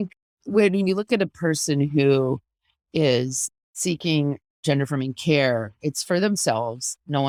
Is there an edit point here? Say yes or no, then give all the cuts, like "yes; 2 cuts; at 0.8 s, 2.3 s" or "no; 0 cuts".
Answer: no; 0 cuts